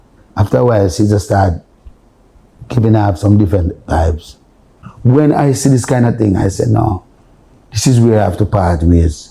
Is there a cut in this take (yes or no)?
yes